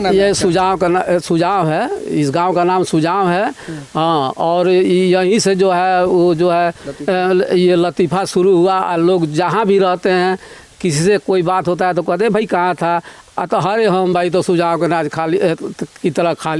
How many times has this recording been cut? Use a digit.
0